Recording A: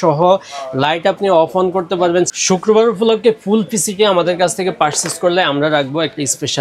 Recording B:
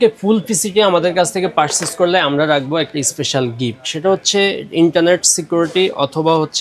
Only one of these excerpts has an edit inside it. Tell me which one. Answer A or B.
A